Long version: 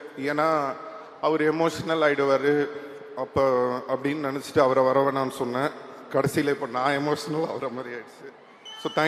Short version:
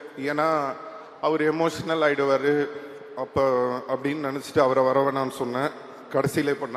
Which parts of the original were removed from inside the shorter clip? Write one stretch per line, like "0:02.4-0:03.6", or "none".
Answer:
none